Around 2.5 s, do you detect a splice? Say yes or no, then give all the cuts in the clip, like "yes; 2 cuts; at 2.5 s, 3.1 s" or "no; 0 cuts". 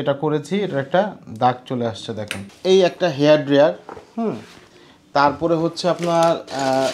yes; 1 cut; at 2.5 s